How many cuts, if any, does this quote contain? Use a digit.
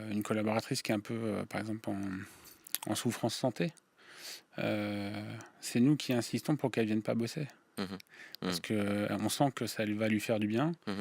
0